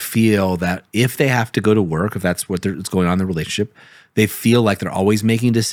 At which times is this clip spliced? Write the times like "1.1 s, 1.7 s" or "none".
none